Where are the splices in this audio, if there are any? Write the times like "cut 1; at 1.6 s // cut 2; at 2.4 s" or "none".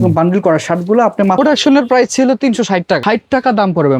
cut 1; at 1.4 s // cut 2; at 3.0 s